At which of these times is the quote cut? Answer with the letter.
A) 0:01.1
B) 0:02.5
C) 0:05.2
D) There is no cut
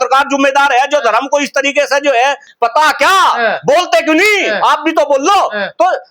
B